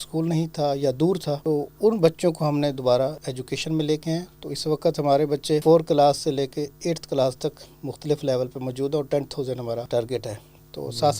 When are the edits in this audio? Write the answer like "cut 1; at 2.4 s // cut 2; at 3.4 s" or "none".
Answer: cut 1; at 1.4 s // cut 2; at 3.3 s // cut 3; at 5.6 s // cut 4; at 9.9 s